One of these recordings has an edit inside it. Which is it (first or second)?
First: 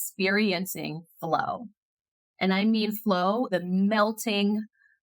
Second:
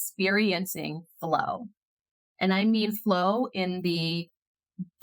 first